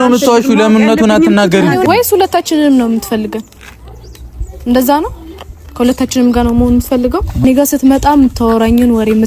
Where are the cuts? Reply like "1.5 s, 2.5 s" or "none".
1.8 s, 7.4 s